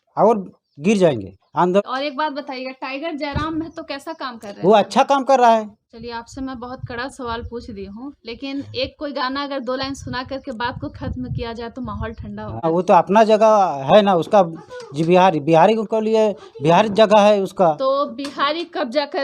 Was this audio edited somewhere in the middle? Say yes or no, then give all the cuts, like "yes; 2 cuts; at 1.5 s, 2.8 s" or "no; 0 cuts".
yes; 3 cuts; at 1.8 s, 5.8 s, 12.6 s